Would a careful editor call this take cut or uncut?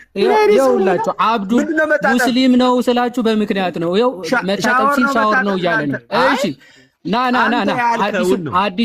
uncut